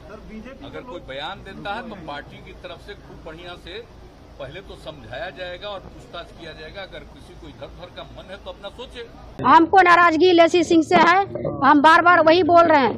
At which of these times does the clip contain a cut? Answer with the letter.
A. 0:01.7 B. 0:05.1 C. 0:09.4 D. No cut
C